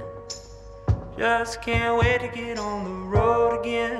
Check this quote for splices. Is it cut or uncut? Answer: uncut